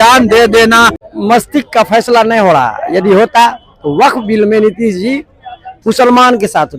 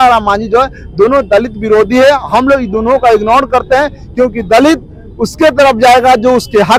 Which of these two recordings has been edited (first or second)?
first